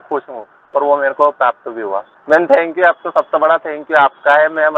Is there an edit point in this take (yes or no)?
yes